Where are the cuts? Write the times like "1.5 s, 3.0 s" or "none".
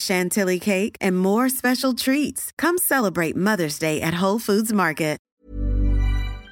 5.3 s